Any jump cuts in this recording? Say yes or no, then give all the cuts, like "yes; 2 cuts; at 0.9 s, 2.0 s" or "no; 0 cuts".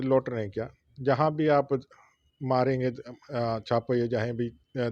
no; 0 cuts